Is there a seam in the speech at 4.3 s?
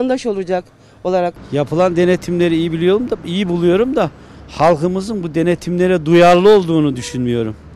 no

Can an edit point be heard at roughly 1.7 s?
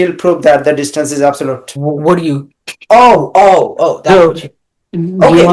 yes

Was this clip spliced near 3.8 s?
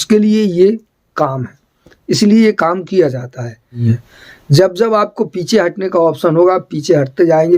yes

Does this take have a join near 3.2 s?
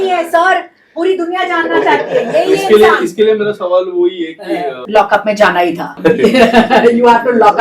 no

